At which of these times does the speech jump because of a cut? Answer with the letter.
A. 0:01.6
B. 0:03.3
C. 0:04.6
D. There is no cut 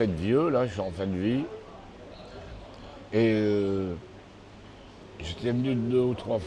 D